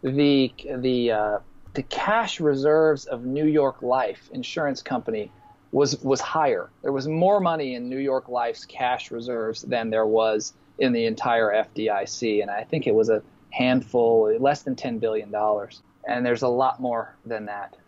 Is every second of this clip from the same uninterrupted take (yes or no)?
yes